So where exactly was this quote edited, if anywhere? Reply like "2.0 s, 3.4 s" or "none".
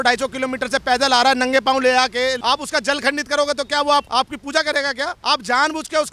2.4 s, 4.1 s, 5.2 s